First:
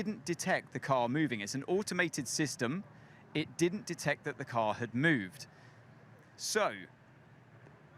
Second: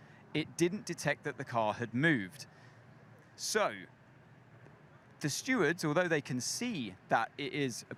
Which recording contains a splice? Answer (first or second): first